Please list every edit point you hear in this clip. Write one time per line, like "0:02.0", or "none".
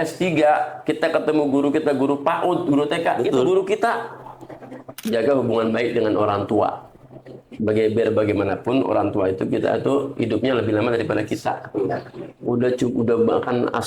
0:04.9